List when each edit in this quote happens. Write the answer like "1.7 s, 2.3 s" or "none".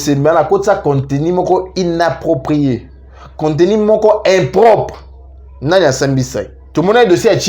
6.6 s

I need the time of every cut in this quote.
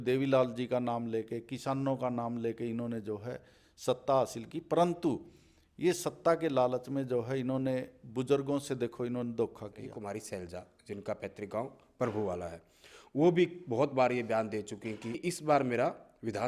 9.9 s, 15.1 s

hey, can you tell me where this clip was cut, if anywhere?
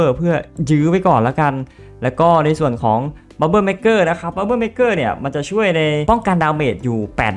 6.0 s

